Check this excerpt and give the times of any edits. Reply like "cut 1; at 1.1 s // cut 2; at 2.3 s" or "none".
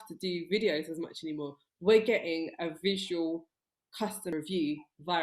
cut 1; at 4.3 s